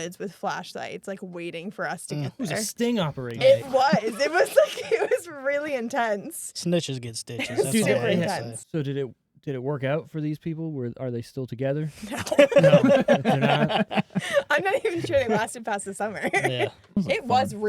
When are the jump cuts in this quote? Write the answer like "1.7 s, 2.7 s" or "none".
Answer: 8.5 s, 17.0 s